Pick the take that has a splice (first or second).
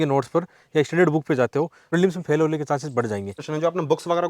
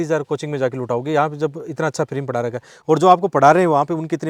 first